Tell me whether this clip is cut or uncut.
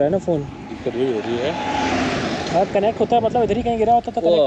uncut